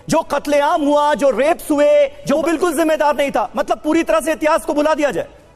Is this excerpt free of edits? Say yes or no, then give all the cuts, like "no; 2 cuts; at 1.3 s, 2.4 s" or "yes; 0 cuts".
no; 1 cut; at 2.4 s